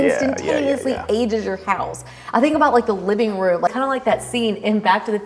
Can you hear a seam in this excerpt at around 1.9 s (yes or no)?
no